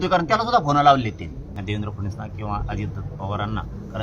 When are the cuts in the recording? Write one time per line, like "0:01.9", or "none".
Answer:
0:01.5